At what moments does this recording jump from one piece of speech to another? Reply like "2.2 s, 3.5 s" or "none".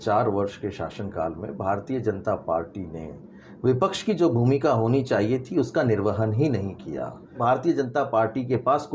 7.4 s